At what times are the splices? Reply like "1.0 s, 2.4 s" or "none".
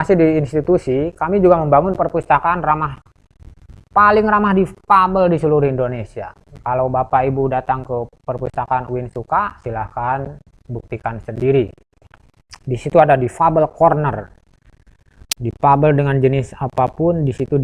1.1 s